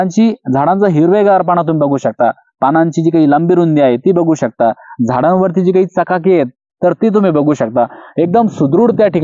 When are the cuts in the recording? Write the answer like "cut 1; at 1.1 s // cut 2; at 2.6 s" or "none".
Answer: none